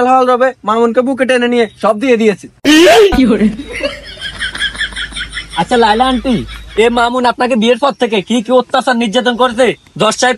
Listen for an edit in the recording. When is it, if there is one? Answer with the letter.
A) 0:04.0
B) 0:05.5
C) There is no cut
C